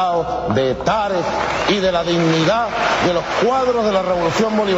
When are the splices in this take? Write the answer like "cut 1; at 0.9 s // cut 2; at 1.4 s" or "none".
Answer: cut 1; at 2.9 s